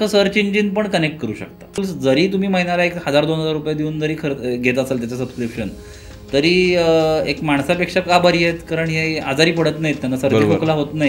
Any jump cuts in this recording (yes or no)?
yes